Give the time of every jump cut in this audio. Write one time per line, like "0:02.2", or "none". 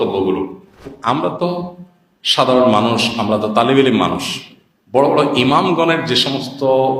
0:00.9